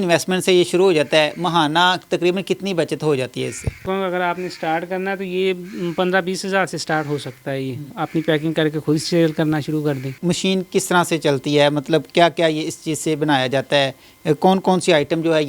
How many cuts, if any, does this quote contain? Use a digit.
3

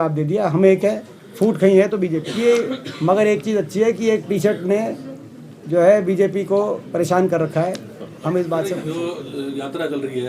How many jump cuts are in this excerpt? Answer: 2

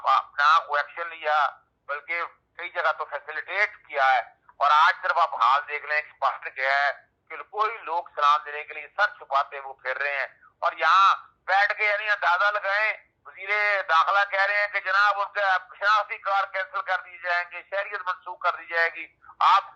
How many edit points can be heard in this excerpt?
0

